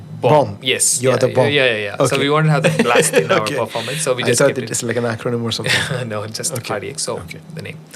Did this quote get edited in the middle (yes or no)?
no